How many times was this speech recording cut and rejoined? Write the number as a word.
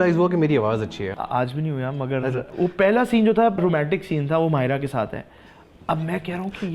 three